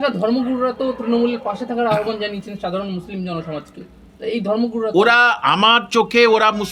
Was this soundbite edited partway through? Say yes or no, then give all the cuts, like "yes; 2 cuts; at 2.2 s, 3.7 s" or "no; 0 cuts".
no; 0 cuts